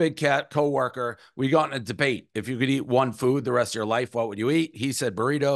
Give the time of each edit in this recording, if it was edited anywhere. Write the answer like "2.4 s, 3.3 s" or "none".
none